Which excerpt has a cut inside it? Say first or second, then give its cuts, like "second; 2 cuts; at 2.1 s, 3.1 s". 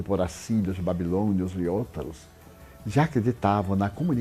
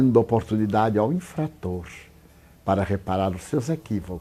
first; 1 cut; at 1.2 s